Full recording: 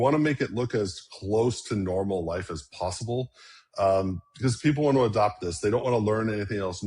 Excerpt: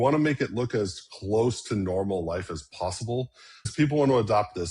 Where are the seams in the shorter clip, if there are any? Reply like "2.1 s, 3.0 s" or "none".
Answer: 3.7 s